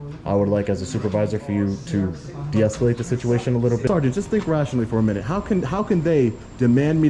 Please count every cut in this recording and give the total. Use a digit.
1